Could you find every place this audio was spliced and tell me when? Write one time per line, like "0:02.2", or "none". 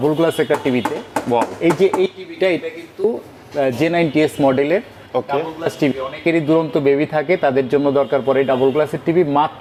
none